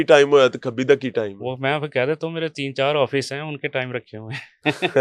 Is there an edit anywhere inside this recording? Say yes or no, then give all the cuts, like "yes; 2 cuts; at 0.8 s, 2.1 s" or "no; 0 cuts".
no; 0 cuts